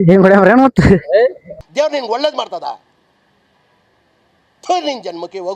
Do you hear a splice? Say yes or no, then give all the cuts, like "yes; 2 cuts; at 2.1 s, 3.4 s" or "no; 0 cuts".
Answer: yes; 1 cut; at 1.7 s